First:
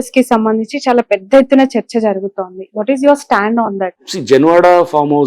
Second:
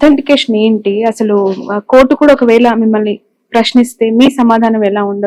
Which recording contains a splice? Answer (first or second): first